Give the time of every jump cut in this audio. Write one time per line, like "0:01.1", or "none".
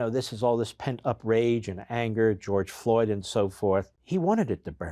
0:04.0

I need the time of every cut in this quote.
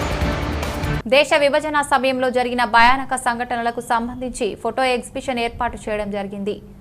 0:01.0

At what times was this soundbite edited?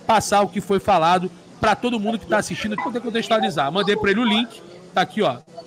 0:02.8

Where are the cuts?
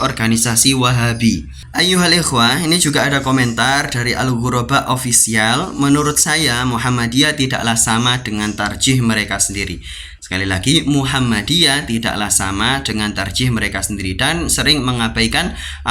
0:01.6

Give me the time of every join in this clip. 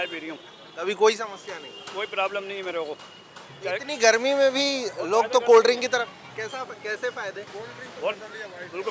none

